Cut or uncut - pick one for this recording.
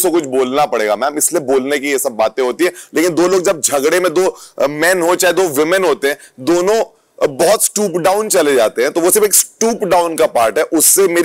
uncut